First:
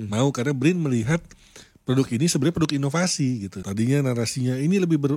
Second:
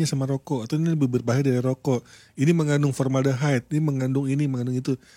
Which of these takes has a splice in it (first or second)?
first